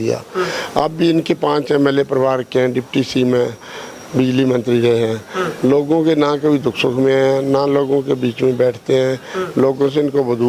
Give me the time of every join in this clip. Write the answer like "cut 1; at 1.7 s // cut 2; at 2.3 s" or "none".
none